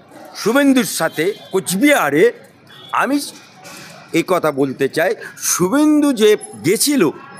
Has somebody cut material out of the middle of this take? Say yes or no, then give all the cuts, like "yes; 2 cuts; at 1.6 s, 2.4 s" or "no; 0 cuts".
no; 0 cuts